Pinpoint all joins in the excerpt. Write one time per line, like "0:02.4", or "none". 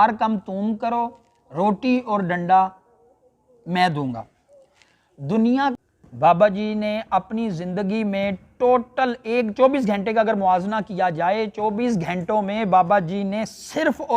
0:05.7